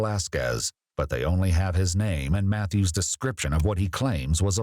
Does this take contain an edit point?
no; 0 cuts

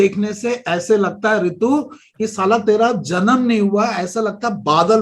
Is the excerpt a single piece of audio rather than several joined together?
yes; 0 cuts

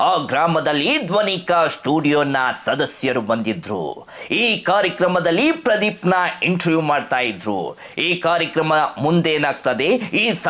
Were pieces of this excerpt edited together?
no; 0 cuts

